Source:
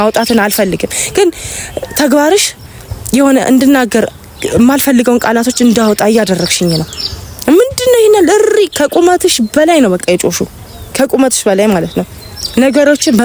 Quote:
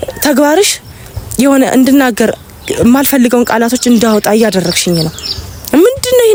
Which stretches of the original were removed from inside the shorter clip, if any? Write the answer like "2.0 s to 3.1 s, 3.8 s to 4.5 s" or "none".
none